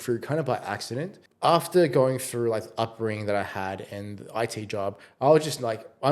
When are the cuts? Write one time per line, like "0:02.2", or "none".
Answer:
0:01.2